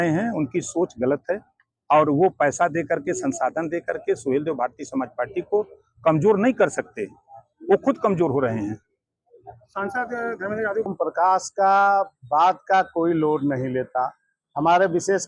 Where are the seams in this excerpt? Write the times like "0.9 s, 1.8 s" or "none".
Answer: 10.9 s